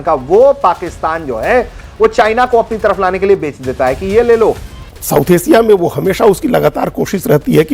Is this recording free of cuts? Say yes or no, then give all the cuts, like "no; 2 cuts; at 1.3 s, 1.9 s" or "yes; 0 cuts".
no; 1 cut; at 4.7 s